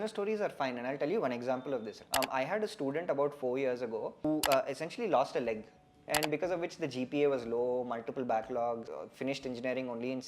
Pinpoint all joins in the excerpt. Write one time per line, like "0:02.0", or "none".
0:02.0
0:04.2
0:05.9
0:09.0